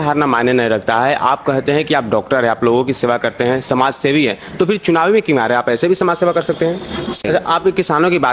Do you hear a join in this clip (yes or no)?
yes